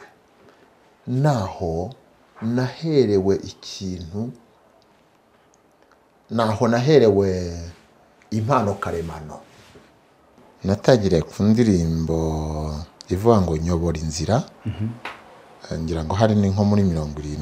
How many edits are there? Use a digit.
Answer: 1